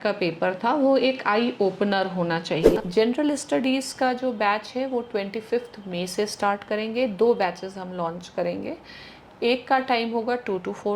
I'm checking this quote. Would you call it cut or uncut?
cut